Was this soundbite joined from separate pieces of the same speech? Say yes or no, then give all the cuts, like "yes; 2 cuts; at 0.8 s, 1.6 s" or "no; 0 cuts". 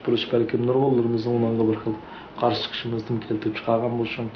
no; 0 cuts